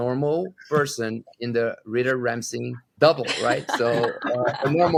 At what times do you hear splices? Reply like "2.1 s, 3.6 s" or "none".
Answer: none